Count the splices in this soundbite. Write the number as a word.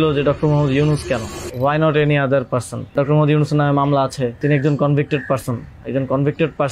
three